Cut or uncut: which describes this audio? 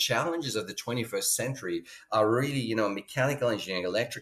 uncut